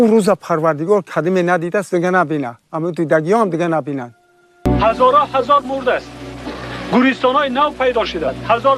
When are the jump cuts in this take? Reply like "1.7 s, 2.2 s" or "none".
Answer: 4.7 s